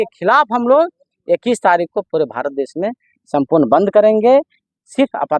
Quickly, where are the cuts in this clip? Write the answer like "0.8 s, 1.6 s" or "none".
none